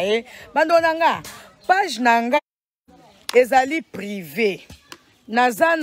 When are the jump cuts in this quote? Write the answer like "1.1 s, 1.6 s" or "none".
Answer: 2.9 s